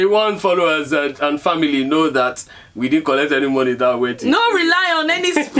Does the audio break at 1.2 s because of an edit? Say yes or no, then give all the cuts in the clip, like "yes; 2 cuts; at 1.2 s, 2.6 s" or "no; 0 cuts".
no; 0 cuts